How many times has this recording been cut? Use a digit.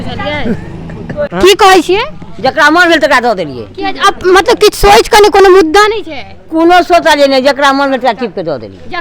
1